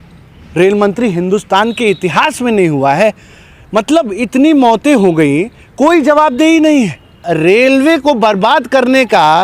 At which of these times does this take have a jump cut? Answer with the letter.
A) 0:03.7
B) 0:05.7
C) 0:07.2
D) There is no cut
C